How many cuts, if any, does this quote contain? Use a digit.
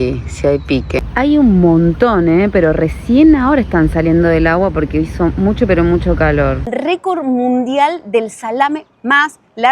2